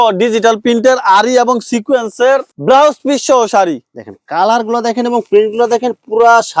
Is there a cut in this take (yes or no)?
no